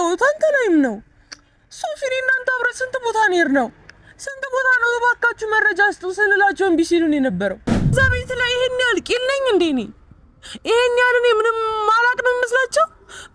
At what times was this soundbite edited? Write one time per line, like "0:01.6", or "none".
0:07.9